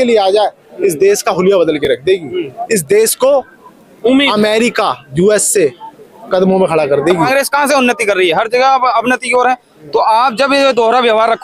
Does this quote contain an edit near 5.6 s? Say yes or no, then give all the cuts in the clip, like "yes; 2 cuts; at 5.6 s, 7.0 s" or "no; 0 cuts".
no; 1 cut; at 7.2 s